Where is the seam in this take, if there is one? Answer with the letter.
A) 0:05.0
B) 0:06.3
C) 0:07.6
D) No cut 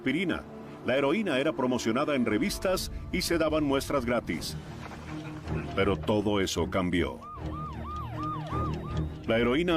A